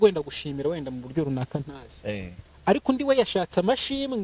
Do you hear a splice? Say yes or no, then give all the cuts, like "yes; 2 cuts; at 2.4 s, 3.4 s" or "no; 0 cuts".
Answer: no; 0 cuts